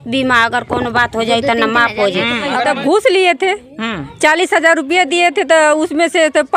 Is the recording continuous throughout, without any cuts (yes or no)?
no